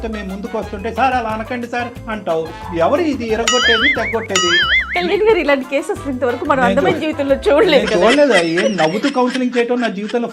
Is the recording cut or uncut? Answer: uncut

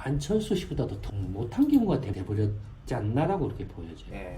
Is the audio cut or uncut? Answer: cut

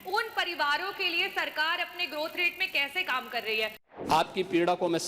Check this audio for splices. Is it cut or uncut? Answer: cut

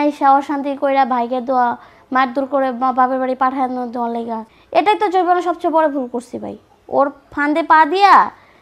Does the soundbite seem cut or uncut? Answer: cut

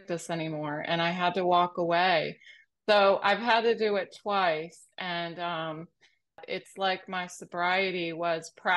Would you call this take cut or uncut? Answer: cut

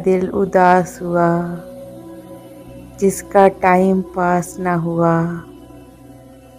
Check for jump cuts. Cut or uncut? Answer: uncut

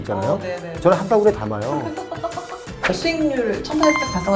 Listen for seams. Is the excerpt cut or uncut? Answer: cut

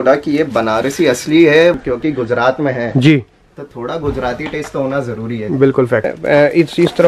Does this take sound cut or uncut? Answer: cut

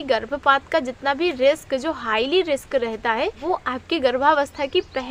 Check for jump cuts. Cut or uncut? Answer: uncut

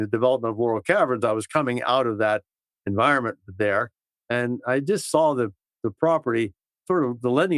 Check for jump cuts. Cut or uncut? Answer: uncut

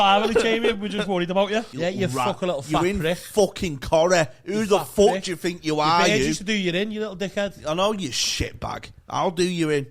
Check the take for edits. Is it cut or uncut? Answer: cut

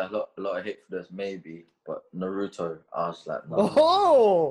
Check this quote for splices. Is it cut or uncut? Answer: uncut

